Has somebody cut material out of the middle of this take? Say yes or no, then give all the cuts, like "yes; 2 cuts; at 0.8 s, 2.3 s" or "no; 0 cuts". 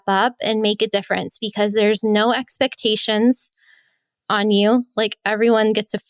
no; 0 cuts